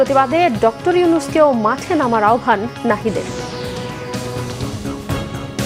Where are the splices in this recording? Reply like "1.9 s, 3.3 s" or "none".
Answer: 4.6 s